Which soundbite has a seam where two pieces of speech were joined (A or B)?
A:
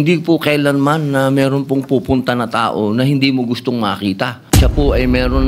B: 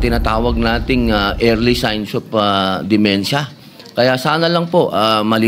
A